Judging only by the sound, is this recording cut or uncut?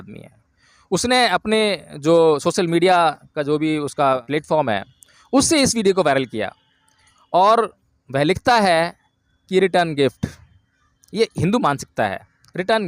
cut